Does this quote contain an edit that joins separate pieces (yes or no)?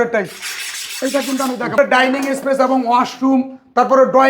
yes